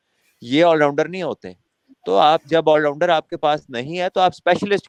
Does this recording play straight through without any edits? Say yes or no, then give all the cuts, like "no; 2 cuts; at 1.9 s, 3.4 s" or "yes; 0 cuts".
yes; 0 cuts